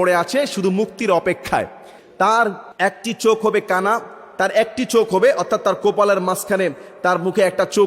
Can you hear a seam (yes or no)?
yes